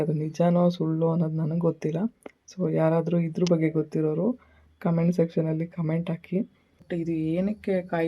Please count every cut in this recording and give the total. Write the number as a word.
one